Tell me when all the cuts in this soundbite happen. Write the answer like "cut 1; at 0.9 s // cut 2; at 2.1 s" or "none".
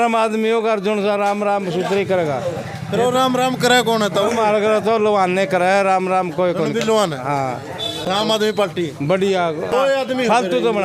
none